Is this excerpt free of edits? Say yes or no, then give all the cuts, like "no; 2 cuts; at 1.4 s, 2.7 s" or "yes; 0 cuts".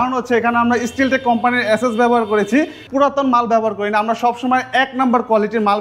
no; 1 cut; at 2.8 s